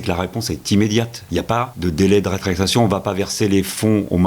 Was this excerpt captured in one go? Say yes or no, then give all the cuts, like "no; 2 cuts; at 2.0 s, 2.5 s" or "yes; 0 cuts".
no; 1 cut; at 1.4 s